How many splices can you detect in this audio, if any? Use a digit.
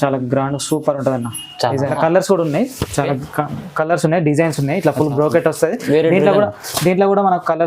1